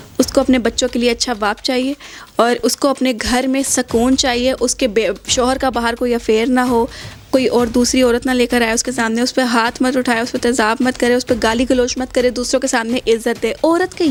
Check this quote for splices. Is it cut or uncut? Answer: uncut